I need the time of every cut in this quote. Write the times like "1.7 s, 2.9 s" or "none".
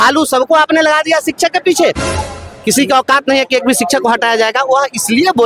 2.4 s